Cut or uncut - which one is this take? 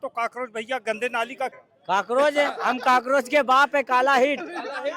cut